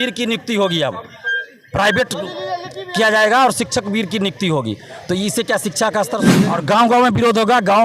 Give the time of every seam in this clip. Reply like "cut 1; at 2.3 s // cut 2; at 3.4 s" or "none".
cut 1; at 6.3 s